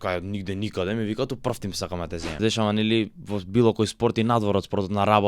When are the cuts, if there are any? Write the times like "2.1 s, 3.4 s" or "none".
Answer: 2.4 s

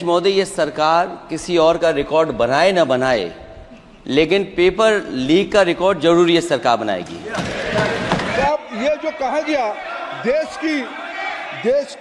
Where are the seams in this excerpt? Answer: 8.3 s

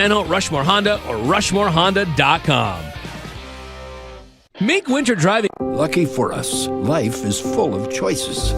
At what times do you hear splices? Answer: 4.9 s, 5.5 s

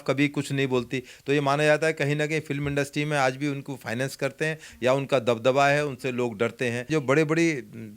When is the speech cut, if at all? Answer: 6.9 s

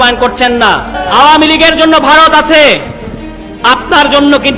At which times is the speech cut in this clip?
1.0 s

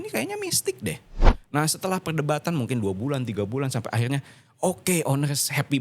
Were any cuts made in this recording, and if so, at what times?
1.3 s

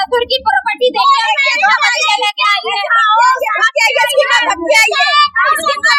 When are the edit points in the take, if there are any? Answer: none

